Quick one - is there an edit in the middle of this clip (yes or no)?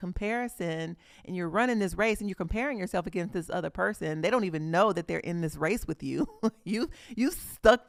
no